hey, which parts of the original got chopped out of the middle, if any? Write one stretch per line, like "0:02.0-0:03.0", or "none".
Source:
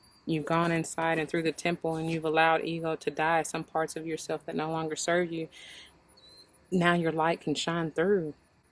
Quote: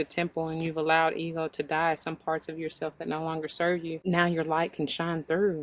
0:05.5-0:06.7